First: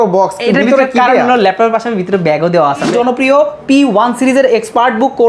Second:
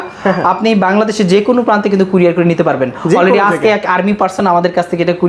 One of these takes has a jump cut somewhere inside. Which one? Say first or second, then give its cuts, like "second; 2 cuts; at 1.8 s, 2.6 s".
first; 1 cut; at 2.9 s